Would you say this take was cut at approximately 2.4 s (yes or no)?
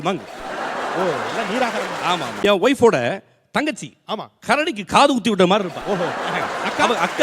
yes